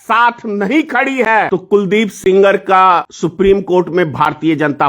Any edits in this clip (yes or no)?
yes